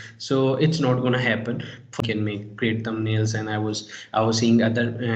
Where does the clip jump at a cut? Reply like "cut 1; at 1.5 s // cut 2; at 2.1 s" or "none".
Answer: cut 1; at 2.0 s